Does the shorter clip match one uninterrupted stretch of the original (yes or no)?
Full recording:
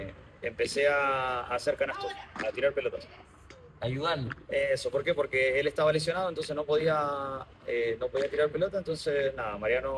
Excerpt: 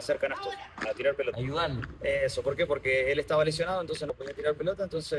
no